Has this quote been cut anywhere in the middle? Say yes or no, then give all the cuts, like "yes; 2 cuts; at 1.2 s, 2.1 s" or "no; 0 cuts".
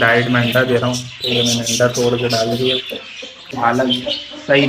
yes; 1 cut; at 3.5 s